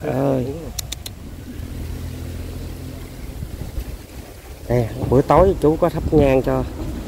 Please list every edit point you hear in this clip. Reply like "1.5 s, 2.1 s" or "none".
1.4 s